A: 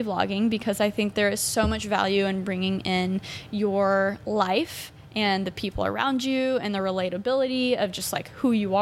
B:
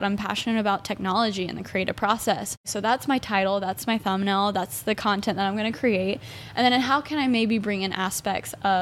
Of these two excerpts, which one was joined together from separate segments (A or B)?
B